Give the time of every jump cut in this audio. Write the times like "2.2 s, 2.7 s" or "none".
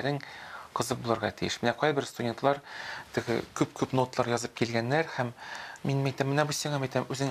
none